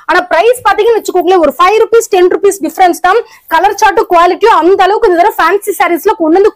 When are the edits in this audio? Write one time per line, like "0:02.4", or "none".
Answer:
none